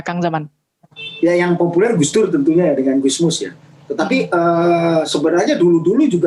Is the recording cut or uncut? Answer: uncut